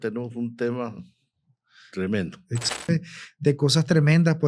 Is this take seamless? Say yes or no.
no